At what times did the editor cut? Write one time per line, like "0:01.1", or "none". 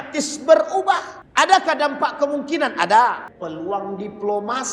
0:01.2
0:03.3